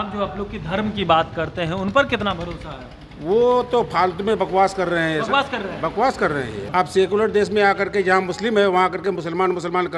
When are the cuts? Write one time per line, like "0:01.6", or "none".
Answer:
0:06.6

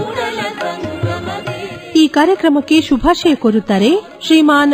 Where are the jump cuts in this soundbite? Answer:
0:01.8

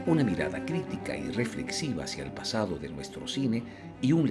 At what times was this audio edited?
none

